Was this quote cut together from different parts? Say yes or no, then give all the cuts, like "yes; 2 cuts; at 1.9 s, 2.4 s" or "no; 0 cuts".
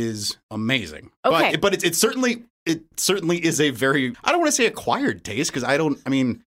no; 0 cuts